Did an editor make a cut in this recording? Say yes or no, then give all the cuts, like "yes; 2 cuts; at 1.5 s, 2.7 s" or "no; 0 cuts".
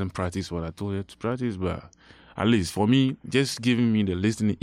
no; 0 cuts